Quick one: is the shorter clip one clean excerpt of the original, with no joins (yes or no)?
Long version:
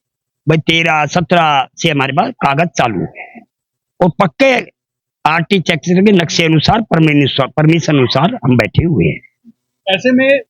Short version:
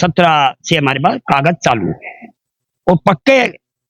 yes